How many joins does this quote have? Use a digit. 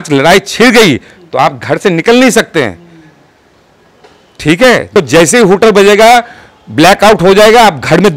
1